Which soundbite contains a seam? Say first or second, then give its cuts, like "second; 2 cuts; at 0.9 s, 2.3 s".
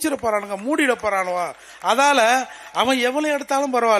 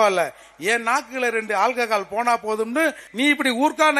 second; 1 cut; at 3.0 s